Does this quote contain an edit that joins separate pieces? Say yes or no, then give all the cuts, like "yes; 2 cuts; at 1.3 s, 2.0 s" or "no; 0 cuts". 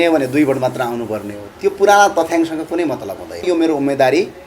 yes; 1 cut; at 3.4 s